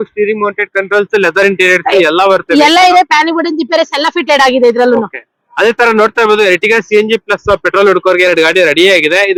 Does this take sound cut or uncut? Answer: uncut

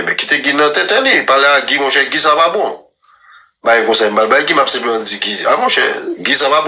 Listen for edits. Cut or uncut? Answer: uncut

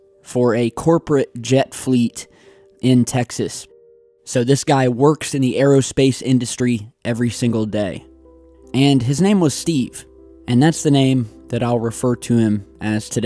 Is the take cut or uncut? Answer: uncut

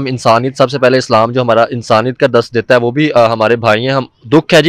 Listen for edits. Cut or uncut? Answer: uncut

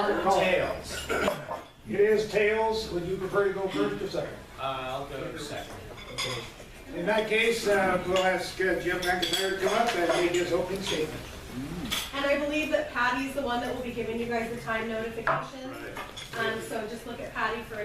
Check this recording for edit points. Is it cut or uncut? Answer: cut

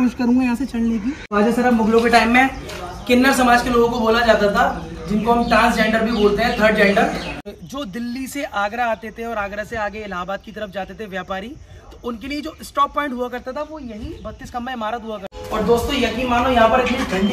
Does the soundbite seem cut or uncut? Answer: cut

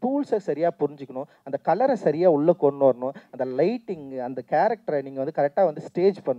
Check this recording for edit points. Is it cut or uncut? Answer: uncut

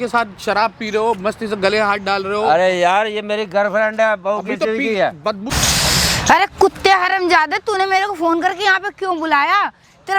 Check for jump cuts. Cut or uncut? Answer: cut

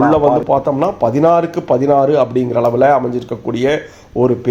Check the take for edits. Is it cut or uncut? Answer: uncut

